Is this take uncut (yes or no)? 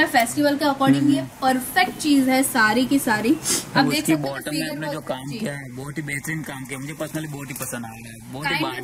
yes